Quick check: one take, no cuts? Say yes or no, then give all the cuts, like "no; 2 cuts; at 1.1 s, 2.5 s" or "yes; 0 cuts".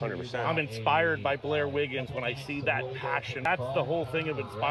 no; 1 cut; at 3.5 s